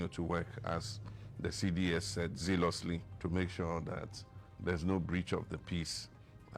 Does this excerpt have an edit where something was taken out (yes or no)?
yes